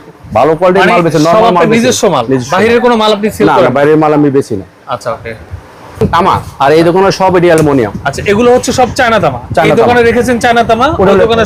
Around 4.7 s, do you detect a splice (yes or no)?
no